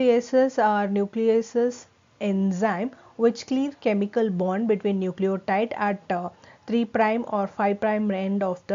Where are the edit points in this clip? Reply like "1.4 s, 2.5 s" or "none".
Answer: none